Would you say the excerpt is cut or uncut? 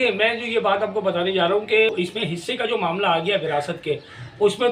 cut